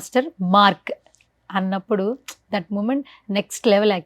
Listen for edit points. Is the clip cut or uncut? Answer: uncut